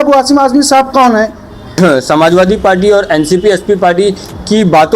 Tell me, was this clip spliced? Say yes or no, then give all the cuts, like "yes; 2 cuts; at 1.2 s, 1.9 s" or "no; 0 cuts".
yes; 1 cut; at 1.8 s